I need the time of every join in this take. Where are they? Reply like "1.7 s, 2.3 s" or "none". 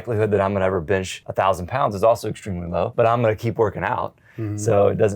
1.2 s, 2.9 s

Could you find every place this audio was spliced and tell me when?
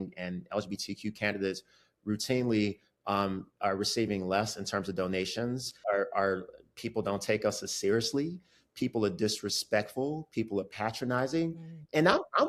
none

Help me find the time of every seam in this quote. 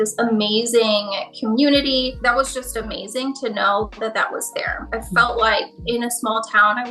2.2 s, 4.9 s

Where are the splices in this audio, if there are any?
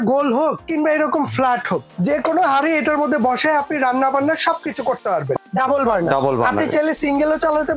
1.9 s, 5.4 s

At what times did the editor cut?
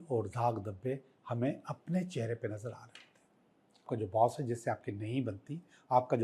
3.9 s

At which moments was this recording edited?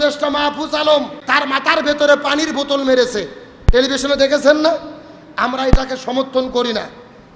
1.3 s

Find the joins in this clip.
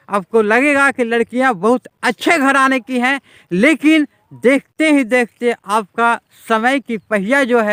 none

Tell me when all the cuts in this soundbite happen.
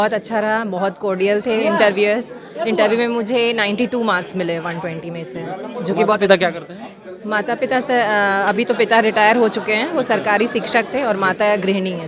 none

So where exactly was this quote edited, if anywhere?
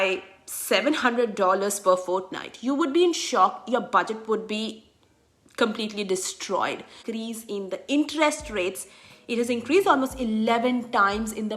7.0 s

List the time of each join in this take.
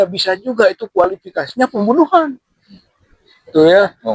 none

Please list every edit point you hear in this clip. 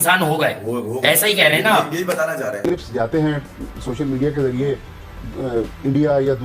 2.6 s

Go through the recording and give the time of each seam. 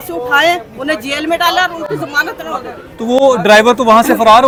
none

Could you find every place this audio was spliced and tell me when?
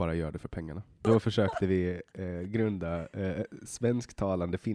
1.0 s

